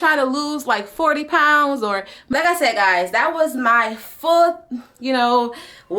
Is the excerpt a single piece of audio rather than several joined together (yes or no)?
no